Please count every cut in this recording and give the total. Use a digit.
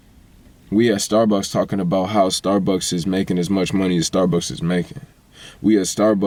0